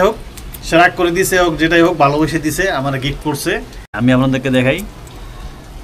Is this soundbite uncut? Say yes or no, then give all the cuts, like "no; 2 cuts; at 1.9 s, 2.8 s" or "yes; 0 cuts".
no; 1 cut; at 3.9 s